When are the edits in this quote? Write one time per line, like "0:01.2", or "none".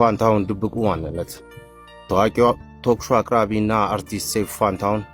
none